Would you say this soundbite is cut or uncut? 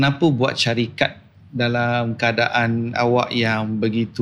uncut